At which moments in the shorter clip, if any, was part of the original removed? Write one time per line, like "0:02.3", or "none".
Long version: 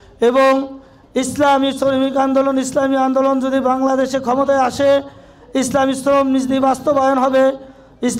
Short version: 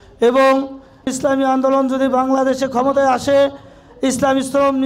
0:01.1